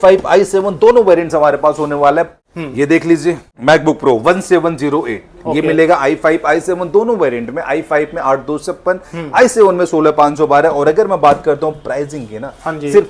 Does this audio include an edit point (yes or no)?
yes